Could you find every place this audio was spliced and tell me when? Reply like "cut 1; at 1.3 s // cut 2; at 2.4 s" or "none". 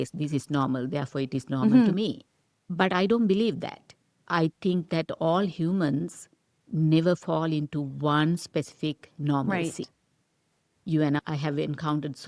cut 1; at 2.6 s